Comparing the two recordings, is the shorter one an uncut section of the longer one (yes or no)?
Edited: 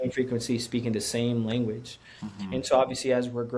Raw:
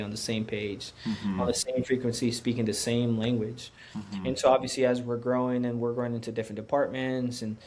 yes